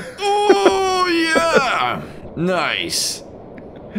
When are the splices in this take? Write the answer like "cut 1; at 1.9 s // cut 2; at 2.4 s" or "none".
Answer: none